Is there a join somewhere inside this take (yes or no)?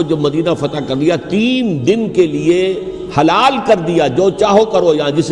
no